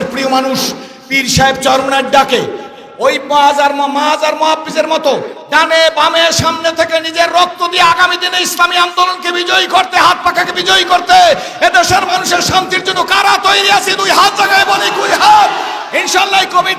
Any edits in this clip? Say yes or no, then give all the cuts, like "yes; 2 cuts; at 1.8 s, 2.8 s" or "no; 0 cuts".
no; 0 cuts